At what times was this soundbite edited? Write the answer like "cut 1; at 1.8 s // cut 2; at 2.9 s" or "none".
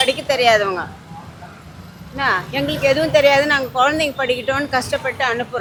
none